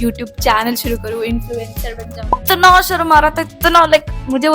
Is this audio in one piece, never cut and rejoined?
no; 1 cut; at 2.3 s

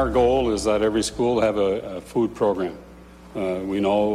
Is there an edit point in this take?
no; 0 cuts

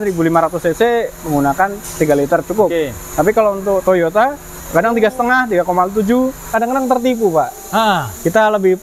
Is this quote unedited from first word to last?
no; 2 cuts; at 4.6 s, 6.5 s

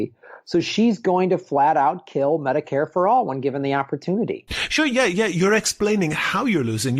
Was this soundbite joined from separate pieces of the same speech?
yes; 1 cut; at 4.7 s

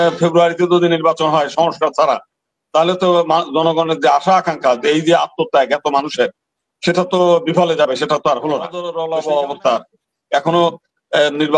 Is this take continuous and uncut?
no; 1 cut; at 8.8 s

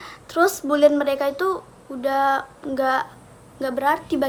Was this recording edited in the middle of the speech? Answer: no; 0 cuts

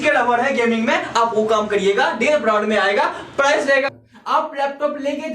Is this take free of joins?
no; 1 cut; at 3.9 s

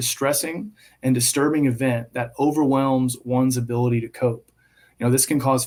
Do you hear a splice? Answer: no; 0 cuts

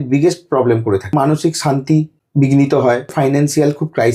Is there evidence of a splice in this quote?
yes; 3 cuts; at 1.1 s, 2.2 s, 3.1 s

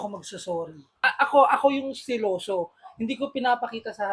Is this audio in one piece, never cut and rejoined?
no; 1 cut; at 1.0 s

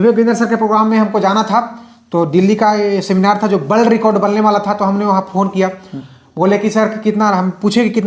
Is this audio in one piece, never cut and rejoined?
yes; 0 cuts

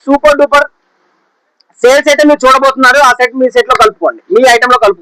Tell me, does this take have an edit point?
no; 0 cuts

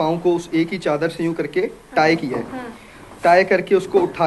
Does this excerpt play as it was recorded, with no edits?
yes; 0 cuts

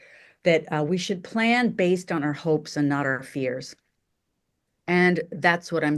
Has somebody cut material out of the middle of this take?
no; 0 cuts

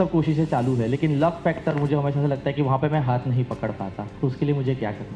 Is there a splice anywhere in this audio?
yes; 1 cut; at 4.1 s

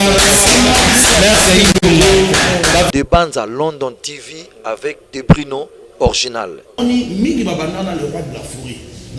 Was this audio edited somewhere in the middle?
yes; 2 cuts; at 2.9 s, 6.8 s

